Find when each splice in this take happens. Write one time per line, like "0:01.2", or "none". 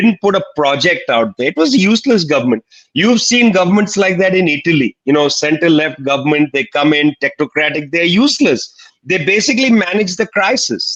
none